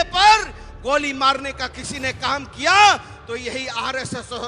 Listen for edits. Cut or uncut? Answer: uncut